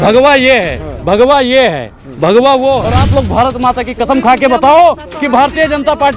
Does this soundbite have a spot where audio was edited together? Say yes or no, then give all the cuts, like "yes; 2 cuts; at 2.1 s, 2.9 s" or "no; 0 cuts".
yes; 1 cut; at 3.0 s